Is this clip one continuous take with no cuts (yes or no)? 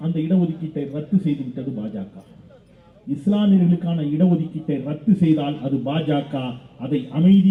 yes